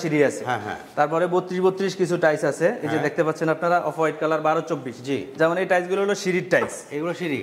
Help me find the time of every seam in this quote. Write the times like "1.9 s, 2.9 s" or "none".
none